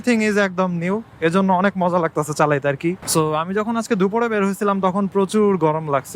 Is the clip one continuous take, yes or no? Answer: no